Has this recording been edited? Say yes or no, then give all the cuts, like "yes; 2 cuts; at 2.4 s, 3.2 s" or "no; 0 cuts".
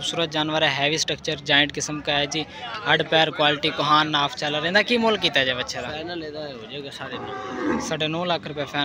no; 0 cuts